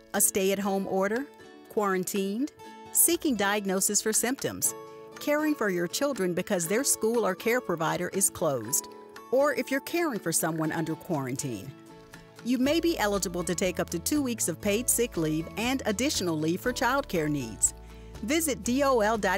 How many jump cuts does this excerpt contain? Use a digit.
0